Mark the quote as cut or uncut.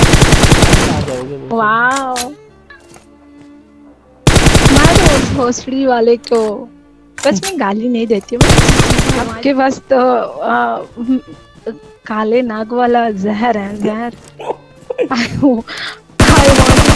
cut